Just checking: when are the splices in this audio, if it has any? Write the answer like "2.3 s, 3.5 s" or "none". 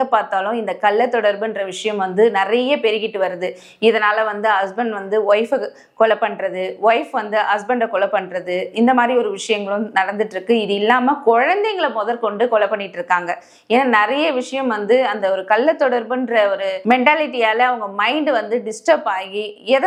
none

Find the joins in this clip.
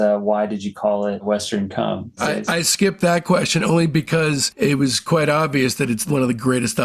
2.3 s, 4.5 s

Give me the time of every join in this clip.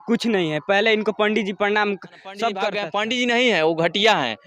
2.8 s

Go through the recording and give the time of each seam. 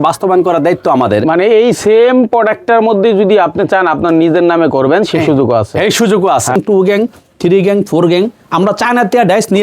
6.6 s

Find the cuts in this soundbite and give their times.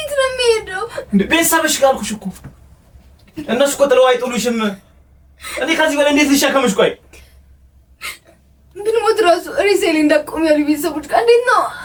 none

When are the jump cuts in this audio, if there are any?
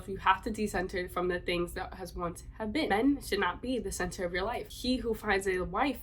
2.9 s, 4.7 s

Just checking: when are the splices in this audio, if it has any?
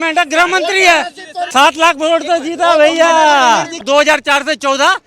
1.5 s, 3.8 s

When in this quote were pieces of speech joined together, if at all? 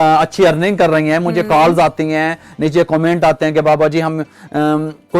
none

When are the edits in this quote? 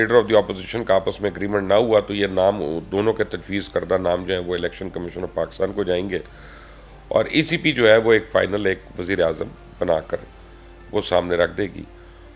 none

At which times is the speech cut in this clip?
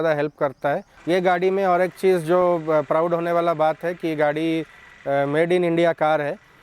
0.9 s

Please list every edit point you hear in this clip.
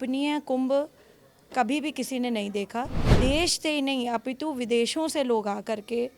3.0 s

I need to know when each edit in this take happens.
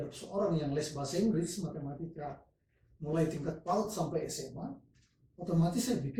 none

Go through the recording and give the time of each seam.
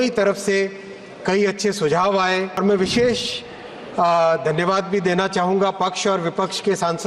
2.6 s

